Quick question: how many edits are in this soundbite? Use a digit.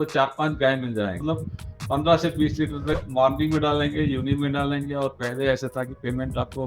1